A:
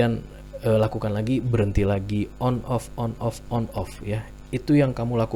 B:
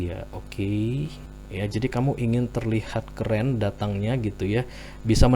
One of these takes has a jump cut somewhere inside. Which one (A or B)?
B